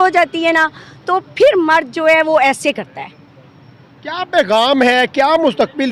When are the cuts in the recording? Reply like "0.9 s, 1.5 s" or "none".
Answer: none